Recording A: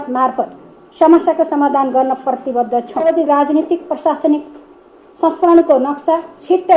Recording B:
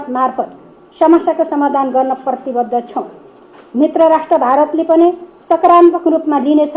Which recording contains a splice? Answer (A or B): A